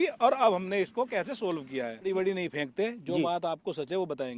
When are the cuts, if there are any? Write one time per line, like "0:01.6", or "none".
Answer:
0:02.0